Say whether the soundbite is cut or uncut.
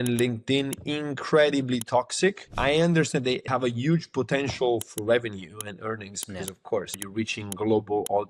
cut